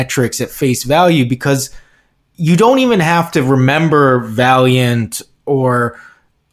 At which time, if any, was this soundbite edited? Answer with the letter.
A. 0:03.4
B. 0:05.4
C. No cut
C